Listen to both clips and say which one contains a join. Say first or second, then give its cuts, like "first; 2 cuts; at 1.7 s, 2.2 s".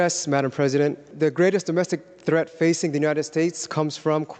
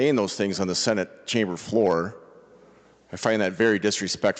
first; 1 cut; at 1.0 s